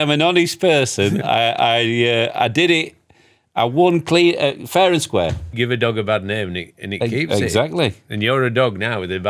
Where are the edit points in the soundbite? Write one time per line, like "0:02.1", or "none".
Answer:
0:05.5